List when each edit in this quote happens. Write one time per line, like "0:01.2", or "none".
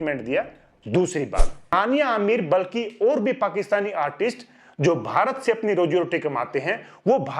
0:01.7